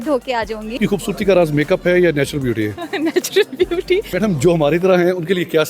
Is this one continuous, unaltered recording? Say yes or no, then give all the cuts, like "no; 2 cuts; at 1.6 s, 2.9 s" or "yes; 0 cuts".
no; 2 cuts; at 0.8 s, 4.1 s